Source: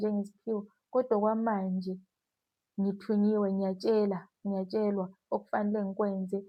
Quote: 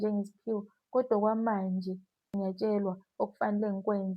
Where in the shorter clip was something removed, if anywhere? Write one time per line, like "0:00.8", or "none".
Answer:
0:02.2

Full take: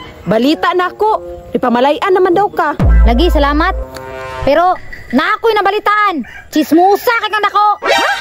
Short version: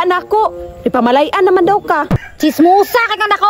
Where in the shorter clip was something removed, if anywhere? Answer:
0:02.2

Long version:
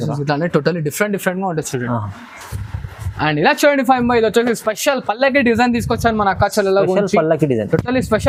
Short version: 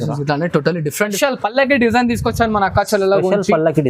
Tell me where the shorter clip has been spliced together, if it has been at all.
0:01.1

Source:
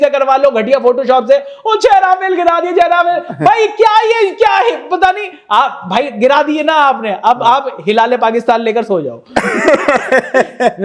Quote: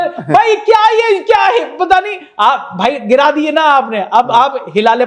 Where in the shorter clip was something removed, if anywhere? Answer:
none

